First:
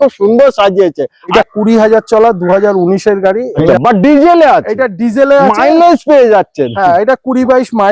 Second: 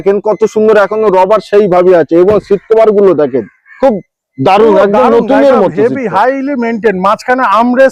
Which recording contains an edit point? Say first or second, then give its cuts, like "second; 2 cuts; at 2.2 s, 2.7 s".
first; 2 cuts; at 1.3 s, 3.7 s